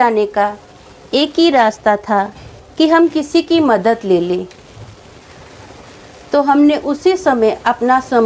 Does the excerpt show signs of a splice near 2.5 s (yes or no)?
no